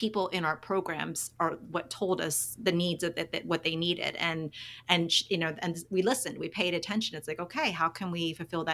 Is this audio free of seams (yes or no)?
yes